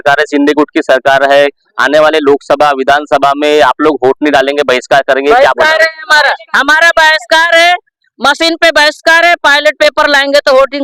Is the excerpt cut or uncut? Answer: uncut